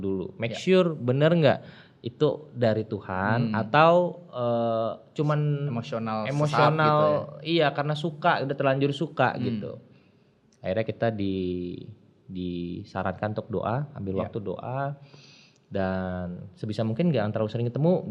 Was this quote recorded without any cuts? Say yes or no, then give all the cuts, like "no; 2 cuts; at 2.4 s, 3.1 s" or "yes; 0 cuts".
yes; 0 cuts